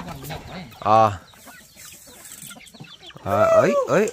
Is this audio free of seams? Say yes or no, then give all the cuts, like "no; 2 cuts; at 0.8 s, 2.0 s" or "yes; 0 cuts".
yes; 0 cuts